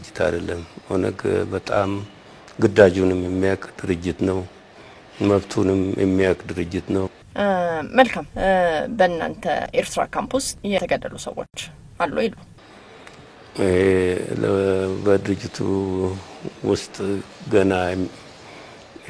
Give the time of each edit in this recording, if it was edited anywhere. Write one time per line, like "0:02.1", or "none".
0:07.2